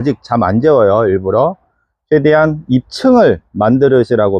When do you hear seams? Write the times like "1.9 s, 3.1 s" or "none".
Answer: none

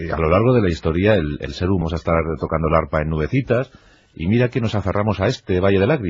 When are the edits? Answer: none

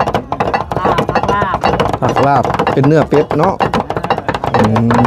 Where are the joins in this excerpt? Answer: none

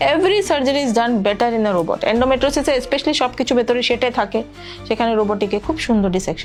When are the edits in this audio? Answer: none

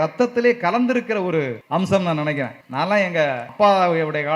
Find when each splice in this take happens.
1.6 s, 2.6 s, 3.5 s

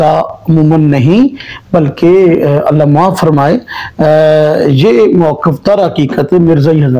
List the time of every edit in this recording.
none

